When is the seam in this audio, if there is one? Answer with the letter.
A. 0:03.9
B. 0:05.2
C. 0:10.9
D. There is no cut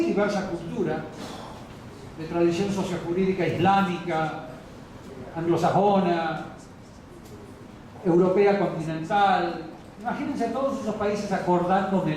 C